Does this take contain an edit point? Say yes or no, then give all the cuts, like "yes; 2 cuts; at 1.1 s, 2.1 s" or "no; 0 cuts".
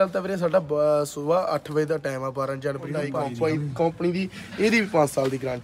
yes; 1 cut; at 3.2 s